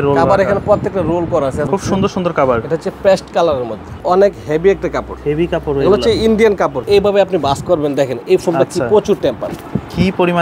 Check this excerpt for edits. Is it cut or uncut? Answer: cut